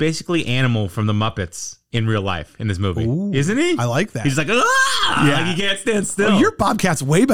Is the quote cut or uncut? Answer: uncut